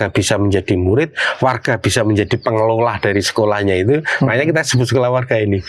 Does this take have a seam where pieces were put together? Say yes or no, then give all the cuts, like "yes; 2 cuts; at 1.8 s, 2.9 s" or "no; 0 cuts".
no; 0 cuts